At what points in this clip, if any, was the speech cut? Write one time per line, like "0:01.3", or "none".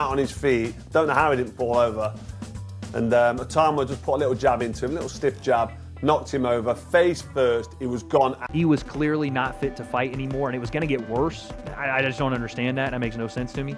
0:08.4

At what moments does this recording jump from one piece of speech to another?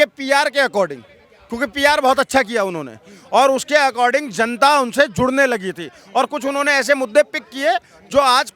none

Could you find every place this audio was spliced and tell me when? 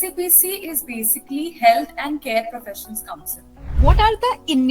0:03.8

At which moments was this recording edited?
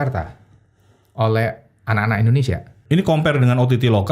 0:02.7

